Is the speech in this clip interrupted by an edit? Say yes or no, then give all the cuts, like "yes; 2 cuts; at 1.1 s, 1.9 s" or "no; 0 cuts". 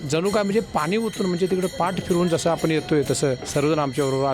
yes; 1 cut; at 3.4 s